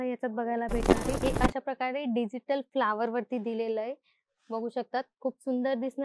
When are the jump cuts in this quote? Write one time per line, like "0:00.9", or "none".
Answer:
0:01.2